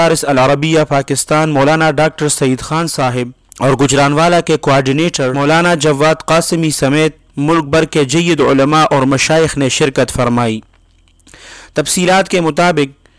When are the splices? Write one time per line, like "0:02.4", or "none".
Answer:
0:03.4
0:05.3